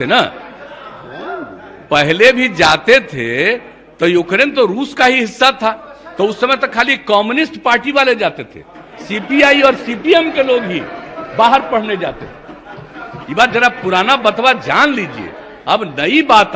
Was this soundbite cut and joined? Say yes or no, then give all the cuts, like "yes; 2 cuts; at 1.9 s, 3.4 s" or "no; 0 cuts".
no; 0 cuts